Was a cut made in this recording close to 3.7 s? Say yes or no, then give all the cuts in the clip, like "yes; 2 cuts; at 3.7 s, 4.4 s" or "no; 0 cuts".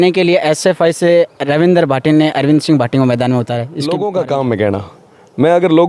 yes; 1 cut; at 3.7 s